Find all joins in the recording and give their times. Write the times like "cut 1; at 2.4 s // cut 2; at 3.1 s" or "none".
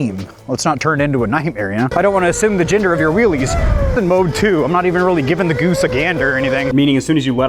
cut 1; at 1.9 s // cut 2; at 3.9 s // cut 3; at 6.7 s

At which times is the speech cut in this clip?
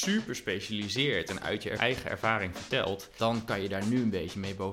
cut 1; at 1.8 s // cut 2; at 3.1 s

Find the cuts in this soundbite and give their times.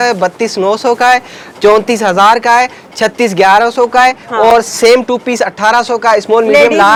none

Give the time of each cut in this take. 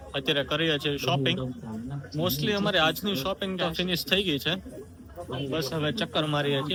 none

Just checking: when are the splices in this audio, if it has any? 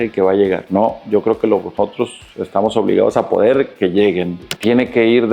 cut 1; at 4.4 s

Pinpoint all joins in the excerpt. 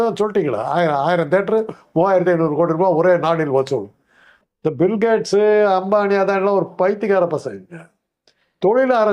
none

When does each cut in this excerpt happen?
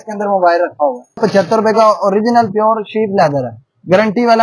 cut 1; at 1.2 s

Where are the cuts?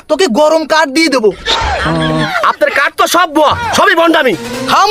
cut 1; at 2.3 s

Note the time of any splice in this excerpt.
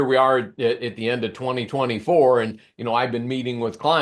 none

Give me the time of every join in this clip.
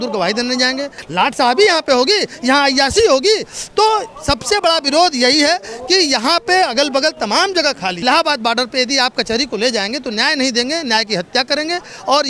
cut 1; at 1.0 s // cut 2; at 7.9 s

